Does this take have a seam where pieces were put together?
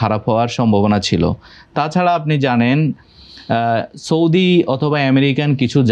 no; 0 cuts

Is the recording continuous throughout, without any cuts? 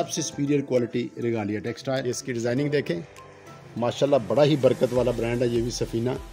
no; 1 cut; at 2.0 s

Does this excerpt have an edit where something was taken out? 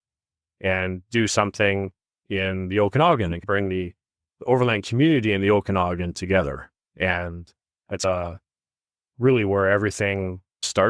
no; 0 cuts

